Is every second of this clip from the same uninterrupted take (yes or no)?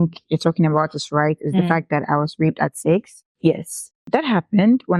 no